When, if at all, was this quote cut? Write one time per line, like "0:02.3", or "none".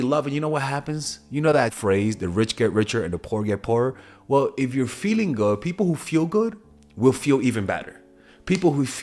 0:01.8